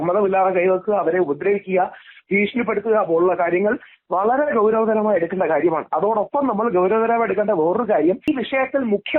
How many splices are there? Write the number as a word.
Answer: one